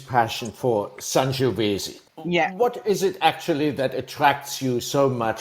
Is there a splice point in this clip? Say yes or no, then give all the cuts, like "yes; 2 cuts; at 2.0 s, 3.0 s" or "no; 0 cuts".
no; 0 cuts